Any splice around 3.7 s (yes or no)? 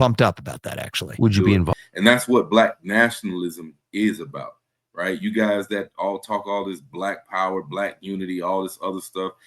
no